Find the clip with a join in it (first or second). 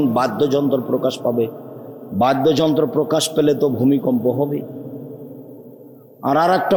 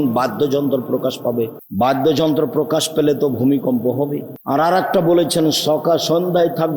second